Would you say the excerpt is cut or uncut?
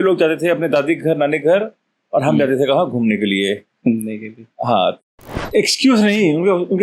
cut